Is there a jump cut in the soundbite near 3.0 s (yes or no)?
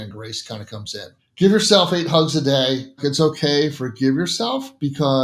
yes